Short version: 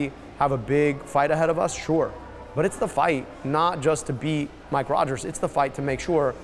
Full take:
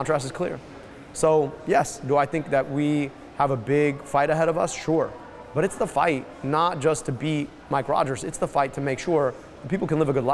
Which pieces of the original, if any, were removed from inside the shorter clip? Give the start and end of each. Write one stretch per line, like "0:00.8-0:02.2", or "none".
none